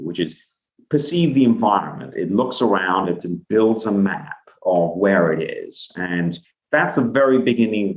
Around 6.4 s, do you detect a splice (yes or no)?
yes